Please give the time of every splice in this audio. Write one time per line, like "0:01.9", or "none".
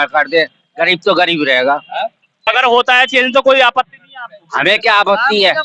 0:02.5